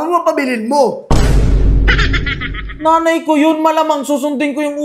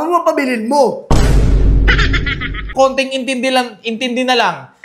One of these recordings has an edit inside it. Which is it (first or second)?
second